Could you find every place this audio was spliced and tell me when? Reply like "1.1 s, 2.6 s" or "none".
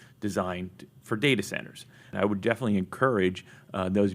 2.1 s